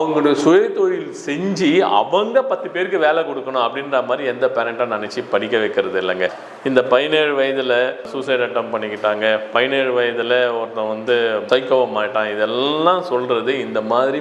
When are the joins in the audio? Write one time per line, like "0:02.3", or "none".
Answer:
0:06.4